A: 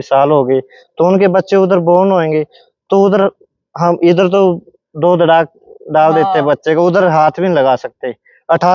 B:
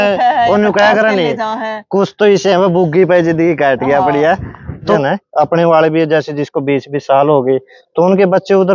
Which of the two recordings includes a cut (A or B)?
B